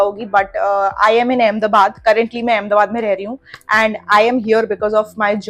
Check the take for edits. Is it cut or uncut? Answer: uncut